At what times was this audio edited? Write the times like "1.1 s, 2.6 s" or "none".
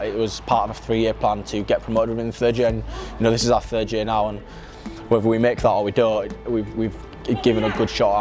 none